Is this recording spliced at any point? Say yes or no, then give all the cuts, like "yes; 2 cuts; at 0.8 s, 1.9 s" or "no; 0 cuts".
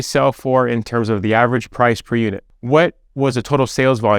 yes; 1 cut; at 2.5 s